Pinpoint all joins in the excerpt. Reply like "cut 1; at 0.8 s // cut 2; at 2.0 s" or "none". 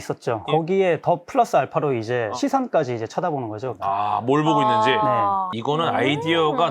cut 1; at 5.5 s

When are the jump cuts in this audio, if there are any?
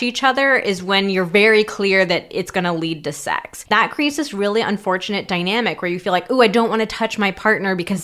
cut 1; at 3.7 s

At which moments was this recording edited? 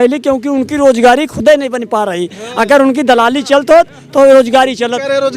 none

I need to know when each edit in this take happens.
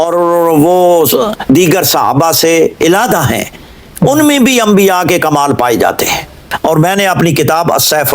cut 1; at 6.4 s

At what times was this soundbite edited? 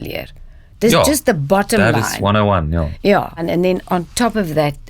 cut 1; at 3.4 s

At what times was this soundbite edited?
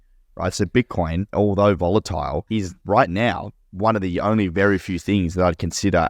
cut 1; at 1.3 s // cut 2; at 2.7 s

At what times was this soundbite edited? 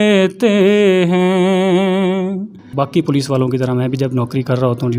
cut 1; at 2.7 s

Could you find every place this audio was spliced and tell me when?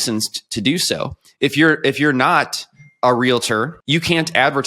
cut 1; at 3.8 s

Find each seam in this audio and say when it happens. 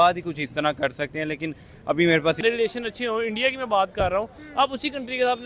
cut 1; at 2.4 s

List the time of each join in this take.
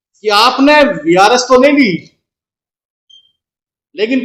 none

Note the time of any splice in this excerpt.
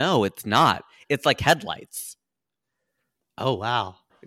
none

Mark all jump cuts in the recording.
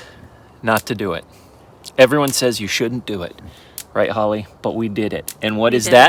none

